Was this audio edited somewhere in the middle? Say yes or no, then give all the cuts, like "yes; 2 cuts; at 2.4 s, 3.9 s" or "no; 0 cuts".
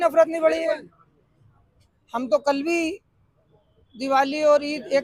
no; 0 cuts